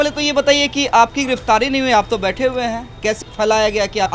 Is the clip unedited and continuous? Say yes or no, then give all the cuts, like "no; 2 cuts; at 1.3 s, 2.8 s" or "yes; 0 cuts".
no; 1 cut; at 3.2 s